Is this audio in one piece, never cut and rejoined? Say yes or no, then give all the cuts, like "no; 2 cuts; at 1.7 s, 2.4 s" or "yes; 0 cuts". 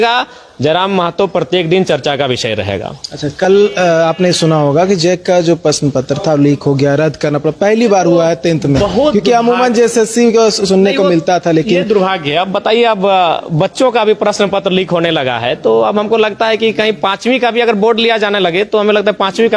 yes; 0 cuts